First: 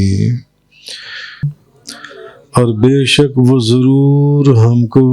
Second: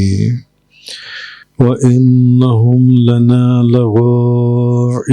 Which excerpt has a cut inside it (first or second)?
first